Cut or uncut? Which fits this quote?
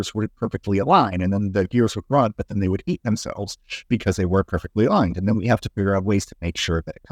uncut